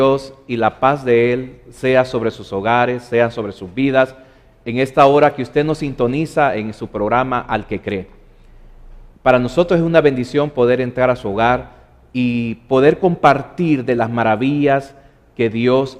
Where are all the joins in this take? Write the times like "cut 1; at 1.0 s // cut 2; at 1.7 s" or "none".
none